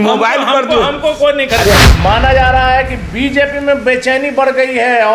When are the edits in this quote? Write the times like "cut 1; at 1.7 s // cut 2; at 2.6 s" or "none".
cut 1; at 1.8 s

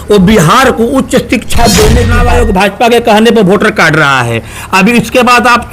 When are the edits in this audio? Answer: cut 1; at 2.2 s

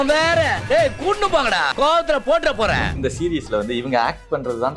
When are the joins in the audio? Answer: cut 1; at 3.0 s

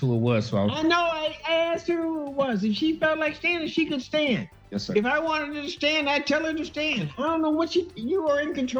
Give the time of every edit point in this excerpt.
none

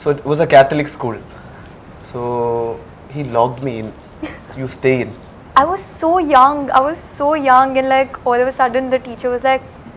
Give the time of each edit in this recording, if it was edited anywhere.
cut 1; at 5.4 s

